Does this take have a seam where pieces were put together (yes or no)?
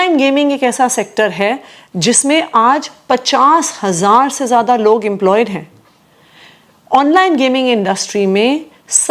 no